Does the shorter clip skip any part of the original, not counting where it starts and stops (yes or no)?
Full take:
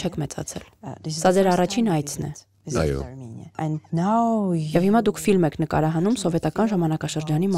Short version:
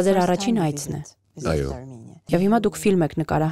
yes